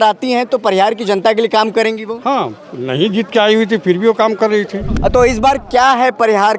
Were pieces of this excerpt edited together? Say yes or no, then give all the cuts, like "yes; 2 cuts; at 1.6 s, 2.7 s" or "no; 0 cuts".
yes; 1 cut; at 4.8 s